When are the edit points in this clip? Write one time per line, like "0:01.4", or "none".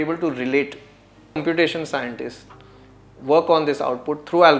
0:01.4